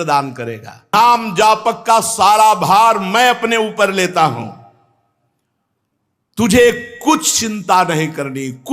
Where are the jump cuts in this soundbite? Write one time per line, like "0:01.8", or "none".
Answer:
0:00.9